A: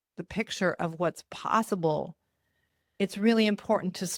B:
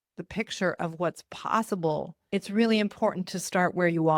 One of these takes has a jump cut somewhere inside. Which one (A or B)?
B